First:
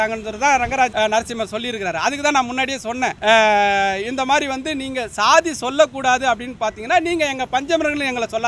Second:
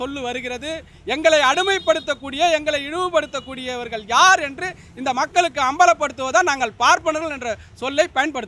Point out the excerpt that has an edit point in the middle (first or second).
first